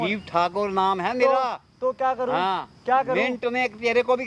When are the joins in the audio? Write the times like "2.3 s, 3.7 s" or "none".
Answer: none